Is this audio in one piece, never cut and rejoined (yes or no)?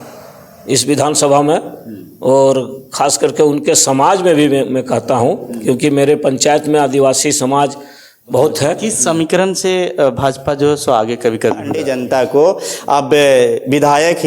no